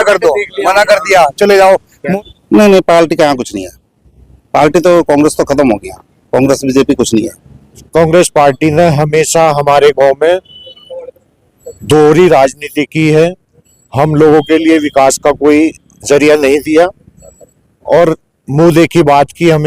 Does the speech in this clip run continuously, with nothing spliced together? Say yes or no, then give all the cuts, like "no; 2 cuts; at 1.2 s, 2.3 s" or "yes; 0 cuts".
no; 2 cuts; at 2.2 s, 7.8 s